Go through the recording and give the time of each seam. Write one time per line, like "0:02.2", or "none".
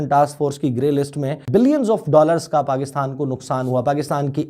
0:01.4

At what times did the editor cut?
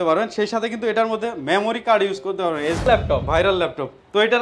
0:02.9

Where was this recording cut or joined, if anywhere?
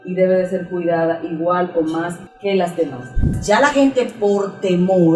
0:02.2
0:03.3

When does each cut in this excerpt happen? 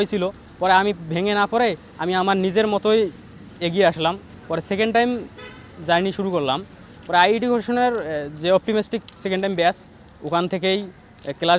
none

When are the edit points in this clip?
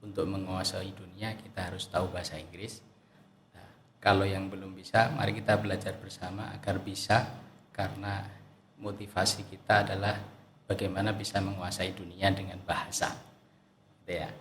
none

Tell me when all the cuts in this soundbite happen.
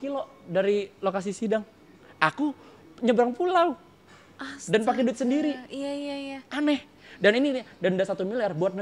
none

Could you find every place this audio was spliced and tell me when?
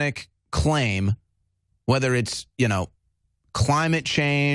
none

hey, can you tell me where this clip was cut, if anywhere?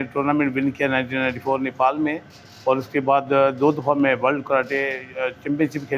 none

